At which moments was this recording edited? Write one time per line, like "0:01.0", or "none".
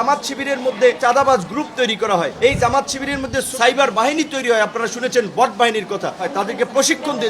0:01.0
0:02.3
0:03.5
0:06.3